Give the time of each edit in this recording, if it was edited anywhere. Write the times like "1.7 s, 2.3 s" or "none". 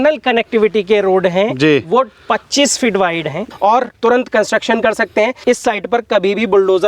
3.5 s, 5.4 s